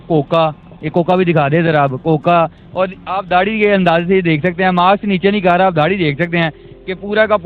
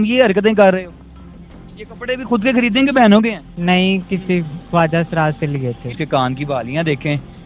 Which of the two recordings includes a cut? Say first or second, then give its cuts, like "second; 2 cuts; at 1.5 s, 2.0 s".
second; 2 cuts; at 3.5 s, 6.0 s